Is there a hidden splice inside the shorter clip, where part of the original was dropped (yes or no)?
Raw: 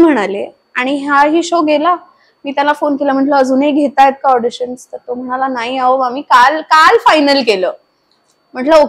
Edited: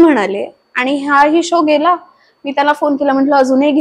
no